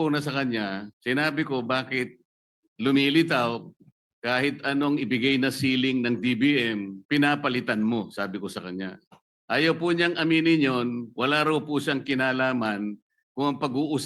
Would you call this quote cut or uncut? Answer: cut